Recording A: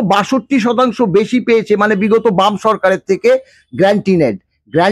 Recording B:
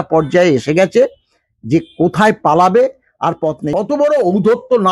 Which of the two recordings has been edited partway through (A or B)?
B